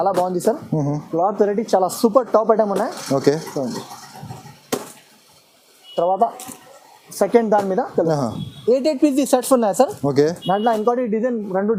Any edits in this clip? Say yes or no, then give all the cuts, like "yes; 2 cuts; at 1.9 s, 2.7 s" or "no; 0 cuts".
no; 0 cuts